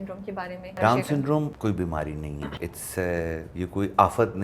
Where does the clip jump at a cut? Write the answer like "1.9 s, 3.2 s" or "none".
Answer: 0.8 s, 1.5 s, 2.5 s, 3.5 s